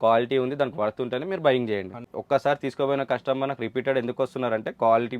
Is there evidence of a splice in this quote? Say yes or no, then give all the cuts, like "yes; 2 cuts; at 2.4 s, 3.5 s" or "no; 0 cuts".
yes; 1 cut; at 2.0 s